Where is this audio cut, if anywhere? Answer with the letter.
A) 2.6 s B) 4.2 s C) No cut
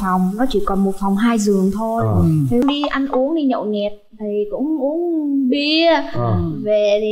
A